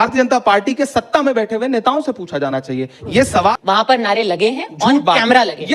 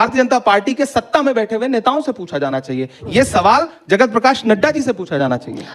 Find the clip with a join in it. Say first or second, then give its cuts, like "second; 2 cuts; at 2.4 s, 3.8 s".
first; 1 cut; at 3.5 s